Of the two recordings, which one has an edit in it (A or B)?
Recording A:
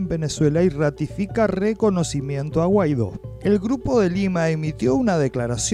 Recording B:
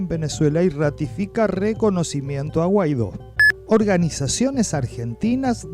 B